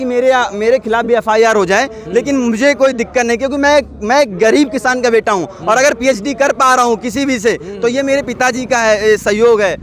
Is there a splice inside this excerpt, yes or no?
no